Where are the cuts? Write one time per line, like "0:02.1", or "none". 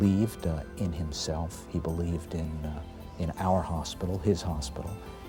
none